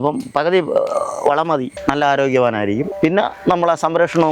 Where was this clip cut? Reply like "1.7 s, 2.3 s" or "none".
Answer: 1.8 s